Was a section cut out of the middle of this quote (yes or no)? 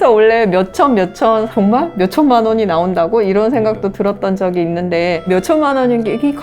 yes